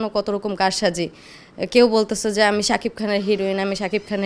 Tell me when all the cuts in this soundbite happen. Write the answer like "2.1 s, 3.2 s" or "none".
none

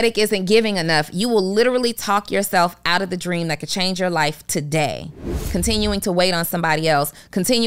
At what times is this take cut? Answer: 5.4 s

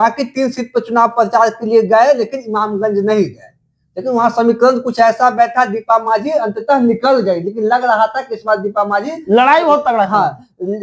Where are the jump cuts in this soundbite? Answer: none

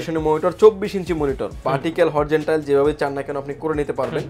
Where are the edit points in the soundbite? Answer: none

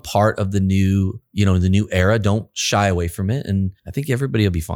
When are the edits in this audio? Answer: 1.2 s, 3.8 s

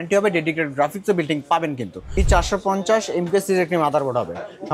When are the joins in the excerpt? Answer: 2.2 s

